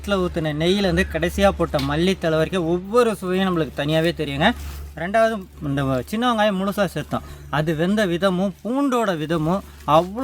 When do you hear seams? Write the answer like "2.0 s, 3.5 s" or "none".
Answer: none